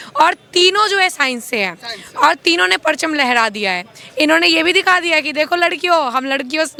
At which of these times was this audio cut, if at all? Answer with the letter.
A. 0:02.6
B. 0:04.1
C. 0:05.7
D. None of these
D